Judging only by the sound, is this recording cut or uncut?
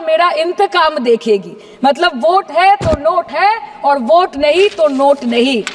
uncut